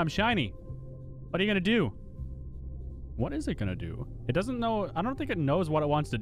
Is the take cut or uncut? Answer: uncut